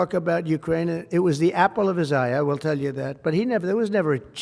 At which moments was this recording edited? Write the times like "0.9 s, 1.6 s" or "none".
none